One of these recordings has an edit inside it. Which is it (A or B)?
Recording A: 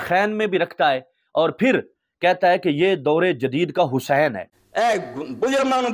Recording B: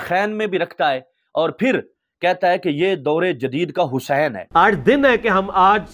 A